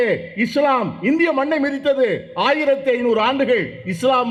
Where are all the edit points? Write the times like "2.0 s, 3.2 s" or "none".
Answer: none